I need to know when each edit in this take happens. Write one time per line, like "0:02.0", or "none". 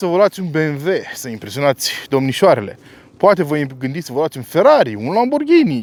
none

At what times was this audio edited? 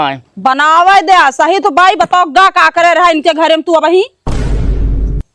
0:04.2

